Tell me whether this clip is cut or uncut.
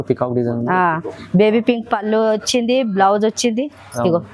uncut